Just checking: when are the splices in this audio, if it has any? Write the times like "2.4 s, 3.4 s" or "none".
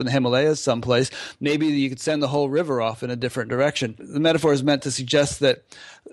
4.0 s

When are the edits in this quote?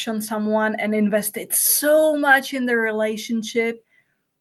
none

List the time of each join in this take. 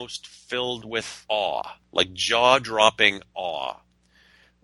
1.1 s

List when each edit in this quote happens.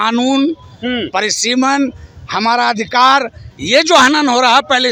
none

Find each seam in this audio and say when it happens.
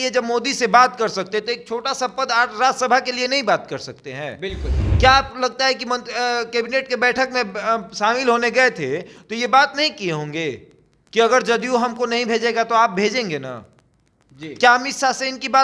none

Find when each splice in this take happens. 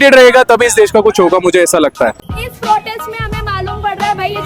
2.2 s

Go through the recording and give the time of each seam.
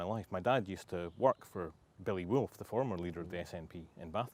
none

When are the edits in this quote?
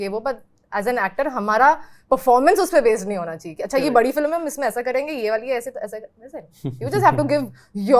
none

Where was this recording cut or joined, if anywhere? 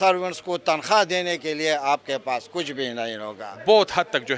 3.2 s

